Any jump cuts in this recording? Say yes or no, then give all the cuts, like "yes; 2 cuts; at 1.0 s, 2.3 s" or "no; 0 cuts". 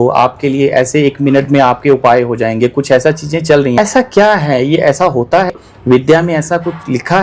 yes; 2 cuts; at 3.8 s, 5.5 s